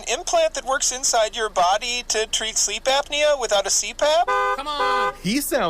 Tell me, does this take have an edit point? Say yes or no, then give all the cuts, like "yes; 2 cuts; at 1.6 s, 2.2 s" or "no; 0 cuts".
yes; 1 cut; at 4.7 s